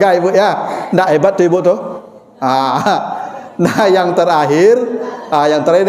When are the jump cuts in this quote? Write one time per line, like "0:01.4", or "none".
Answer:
none